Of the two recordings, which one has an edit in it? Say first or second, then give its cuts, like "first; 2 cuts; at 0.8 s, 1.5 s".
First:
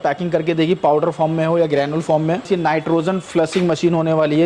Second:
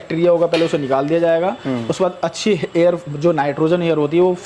first; 1 cut; at 2.5 s